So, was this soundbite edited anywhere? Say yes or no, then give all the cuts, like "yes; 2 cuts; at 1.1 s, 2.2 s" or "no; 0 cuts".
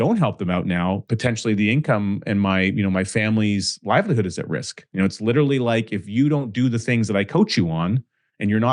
yes; 2 cuts; at 1.1 s, 4.9 s